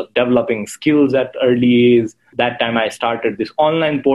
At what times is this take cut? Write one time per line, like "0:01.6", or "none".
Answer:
0:02.3